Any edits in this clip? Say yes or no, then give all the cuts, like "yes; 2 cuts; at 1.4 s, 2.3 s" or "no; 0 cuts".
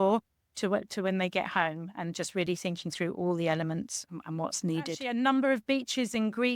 yes; 1 cut; at 5.0 s